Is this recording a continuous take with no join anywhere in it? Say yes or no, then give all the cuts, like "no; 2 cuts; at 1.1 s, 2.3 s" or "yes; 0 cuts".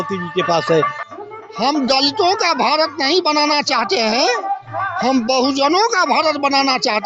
no; 1 cut; at 1.0 s